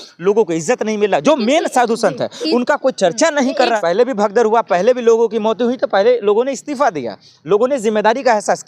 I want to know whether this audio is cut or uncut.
cut